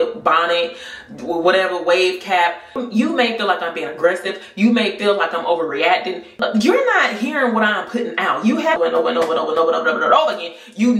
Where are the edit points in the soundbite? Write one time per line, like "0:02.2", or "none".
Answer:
0:02.8
0:06.4
0:08.8